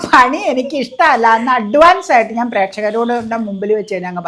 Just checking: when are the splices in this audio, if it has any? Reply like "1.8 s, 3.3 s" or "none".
none